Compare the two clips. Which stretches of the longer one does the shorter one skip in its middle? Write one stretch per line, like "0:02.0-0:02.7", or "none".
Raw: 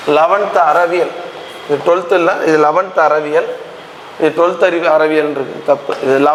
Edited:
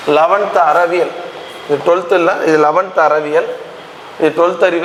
none